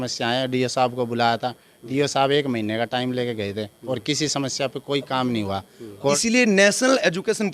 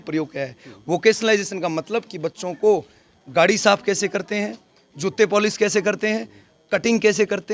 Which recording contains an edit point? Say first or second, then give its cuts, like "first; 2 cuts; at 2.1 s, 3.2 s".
first; 1 cut; at 6.2 s